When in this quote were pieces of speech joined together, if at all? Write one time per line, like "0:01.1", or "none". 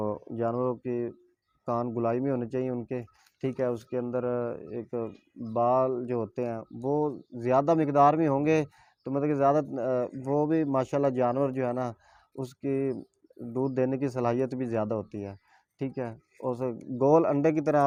none